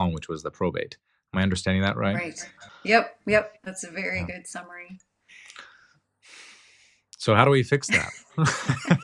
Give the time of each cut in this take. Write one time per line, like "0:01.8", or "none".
none